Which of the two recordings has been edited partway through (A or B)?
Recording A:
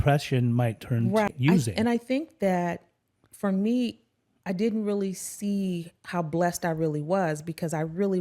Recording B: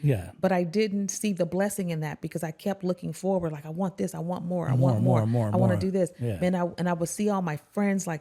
A